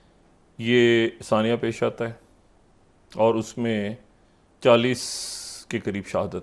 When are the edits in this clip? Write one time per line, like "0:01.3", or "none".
none